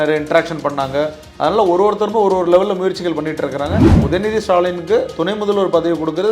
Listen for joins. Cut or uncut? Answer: cut